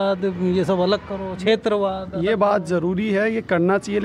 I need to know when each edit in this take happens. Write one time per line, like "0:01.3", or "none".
none